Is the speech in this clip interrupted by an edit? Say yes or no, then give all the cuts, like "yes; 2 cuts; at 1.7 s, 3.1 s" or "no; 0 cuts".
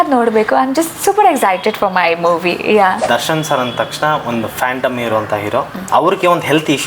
yes; 2 cuts; at 3.0 s, 5.8 s